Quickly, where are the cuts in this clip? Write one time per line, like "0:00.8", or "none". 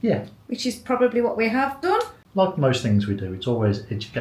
0:02.2